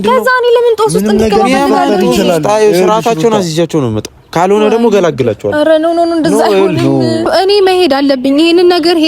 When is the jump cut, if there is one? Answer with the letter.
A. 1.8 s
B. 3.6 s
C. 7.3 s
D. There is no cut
C